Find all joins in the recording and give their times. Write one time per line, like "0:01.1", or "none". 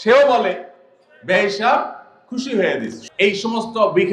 0:03.2